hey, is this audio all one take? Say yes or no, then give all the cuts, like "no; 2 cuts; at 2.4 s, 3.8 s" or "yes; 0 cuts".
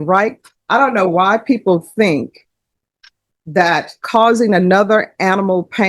yes; 0 cuts